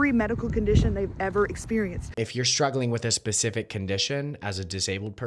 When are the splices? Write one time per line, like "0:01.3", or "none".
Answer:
0:02.1